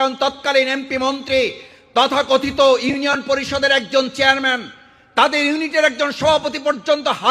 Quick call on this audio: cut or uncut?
uncut